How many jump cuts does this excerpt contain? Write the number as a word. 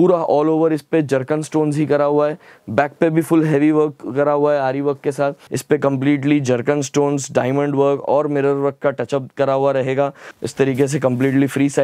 two